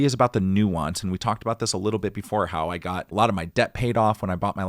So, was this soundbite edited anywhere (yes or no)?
yes